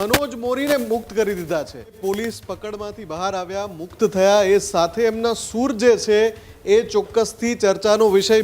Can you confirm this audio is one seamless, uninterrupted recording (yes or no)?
no